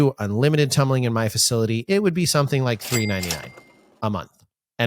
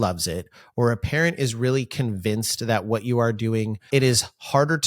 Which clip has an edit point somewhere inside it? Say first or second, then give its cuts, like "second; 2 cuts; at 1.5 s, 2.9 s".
second; 1 cut; at 3.9 s